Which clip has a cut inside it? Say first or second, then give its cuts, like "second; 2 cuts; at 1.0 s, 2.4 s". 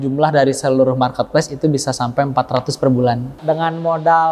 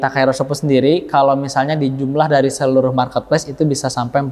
first; 1 cut; at 3.4 s